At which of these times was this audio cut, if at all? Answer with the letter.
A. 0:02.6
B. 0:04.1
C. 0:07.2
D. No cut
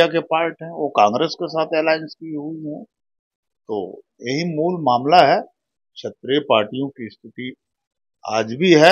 D